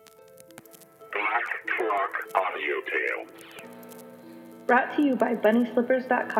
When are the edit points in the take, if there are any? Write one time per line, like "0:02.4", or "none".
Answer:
0:01.1